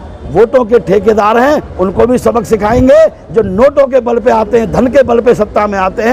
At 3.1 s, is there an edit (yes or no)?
no